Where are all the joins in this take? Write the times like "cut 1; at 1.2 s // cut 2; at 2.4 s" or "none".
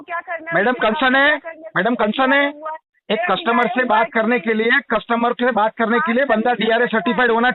none